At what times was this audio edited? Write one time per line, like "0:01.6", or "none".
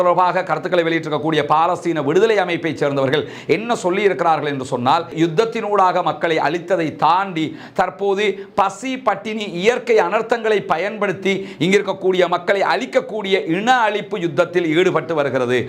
0:05.1